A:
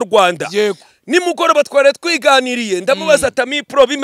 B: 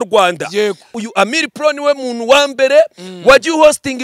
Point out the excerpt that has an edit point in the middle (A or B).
B